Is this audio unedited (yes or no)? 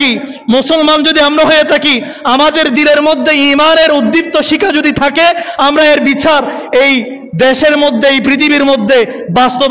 yes